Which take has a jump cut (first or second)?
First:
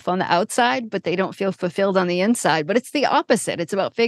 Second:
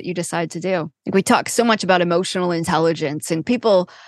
second